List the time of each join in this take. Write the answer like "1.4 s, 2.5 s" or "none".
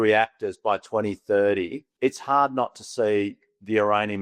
1.8 s

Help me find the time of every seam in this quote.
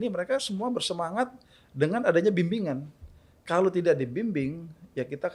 none

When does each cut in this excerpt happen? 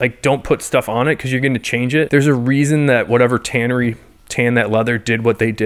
2.1 s

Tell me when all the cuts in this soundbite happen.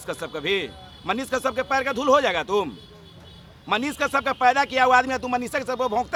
none

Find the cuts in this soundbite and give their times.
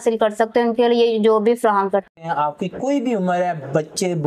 2.3 s

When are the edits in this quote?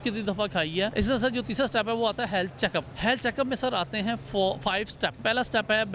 0.9 s, 2.9 s, 5.2 s

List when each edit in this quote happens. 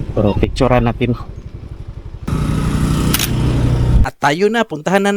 4.1 s

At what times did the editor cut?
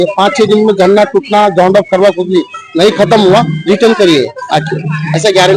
none

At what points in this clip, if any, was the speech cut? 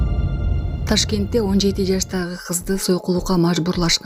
none

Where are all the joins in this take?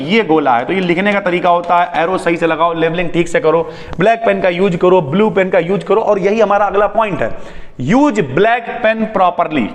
none

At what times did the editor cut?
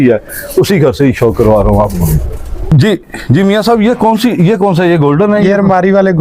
2.6 s

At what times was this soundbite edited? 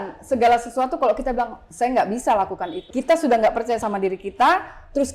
2.9 s

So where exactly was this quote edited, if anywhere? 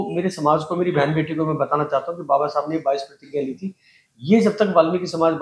none

